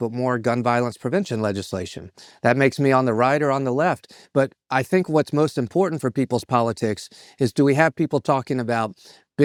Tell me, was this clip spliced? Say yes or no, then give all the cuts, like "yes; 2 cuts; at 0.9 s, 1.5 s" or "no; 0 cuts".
no; 0 cuts